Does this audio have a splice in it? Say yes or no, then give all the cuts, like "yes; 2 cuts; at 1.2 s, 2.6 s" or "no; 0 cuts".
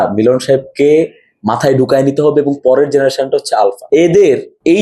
no; 0 cuts